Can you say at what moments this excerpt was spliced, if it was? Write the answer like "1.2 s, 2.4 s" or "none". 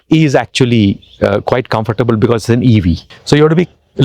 3.1 s